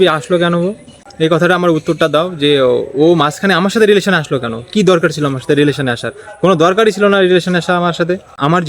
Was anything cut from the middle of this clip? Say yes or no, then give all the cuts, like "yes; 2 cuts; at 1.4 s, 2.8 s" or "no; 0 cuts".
no; 0 cuts